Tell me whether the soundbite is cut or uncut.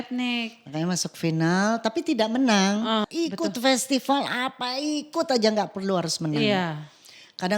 cut